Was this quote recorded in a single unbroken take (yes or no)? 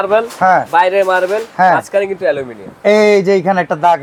yes